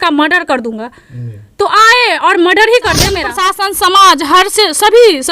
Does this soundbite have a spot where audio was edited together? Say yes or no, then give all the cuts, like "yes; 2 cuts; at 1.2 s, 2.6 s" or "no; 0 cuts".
yes; 1 cut; at 3.4 s